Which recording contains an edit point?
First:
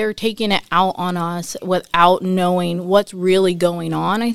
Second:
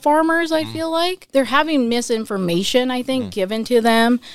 second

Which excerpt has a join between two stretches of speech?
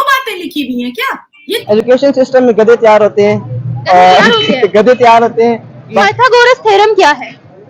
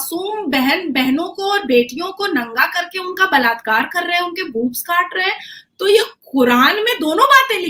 first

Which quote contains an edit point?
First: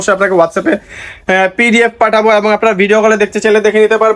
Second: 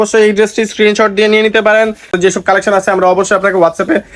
second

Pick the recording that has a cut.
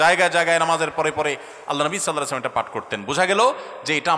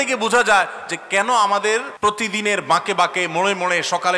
second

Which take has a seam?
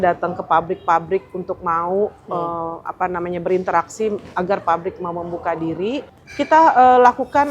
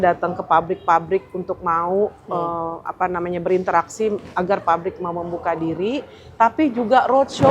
first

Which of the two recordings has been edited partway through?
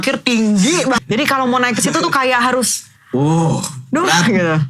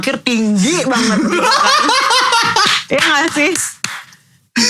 first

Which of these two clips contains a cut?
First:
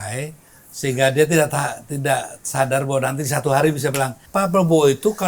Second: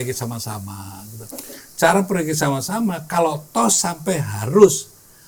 first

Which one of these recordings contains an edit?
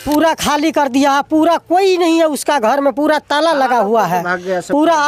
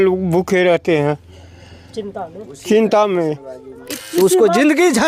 second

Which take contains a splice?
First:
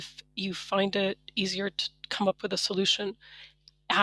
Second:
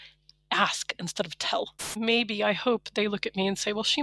second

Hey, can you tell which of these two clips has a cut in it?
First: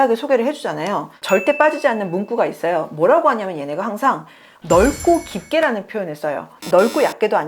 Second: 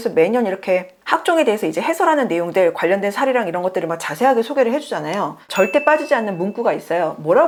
first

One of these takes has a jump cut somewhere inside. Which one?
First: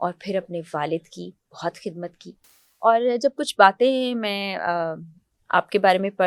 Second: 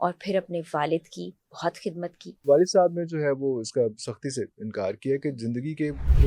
second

